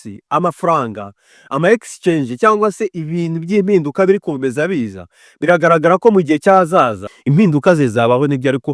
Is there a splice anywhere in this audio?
yes; 1 cut; at 7.1 s

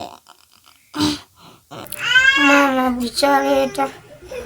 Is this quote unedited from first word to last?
no; 1 cut; at 1.8 s

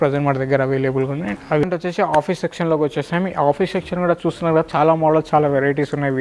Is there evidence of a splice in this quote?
yes; 1 cut; at 1.6 s

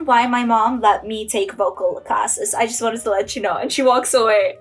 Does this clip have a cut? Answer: no; 0 cuts

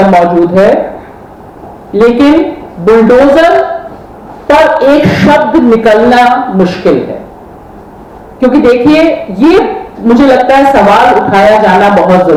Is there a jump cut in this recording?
no; 0 cuts

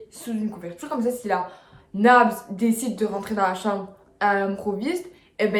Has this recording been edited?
no; 0 cuts

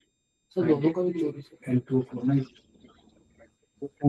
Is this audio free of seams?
yes; 0 cuts

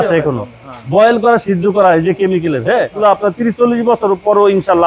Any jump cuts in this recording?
yes; 1 cut; at 3.0 s

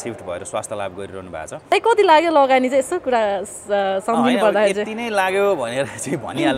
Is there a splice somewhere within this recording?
yes; 1 cut; at 1.5 s

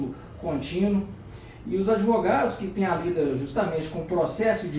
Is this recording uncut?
yes; 0 cuts

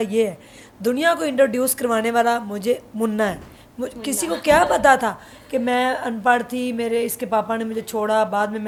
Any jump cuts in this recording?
no; 0 cuts

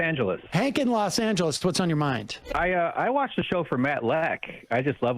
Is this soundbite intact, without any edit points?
no; 1 cut; at 2.5 s

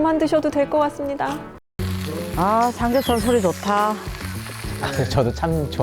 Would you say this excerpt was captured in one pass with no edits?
no; 1 cut; at 1.8 s

